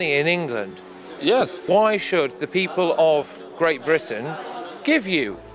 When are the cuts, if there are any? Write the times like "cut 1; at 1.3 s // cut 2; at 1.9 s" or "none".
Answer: cut 1; at 1.6 s